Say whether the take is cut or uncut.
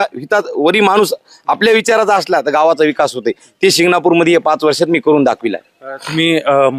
uncut